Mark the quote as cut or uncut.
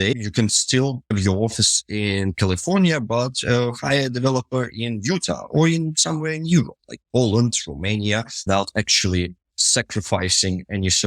cut